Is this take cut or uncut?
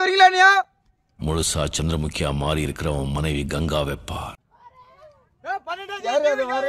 uncut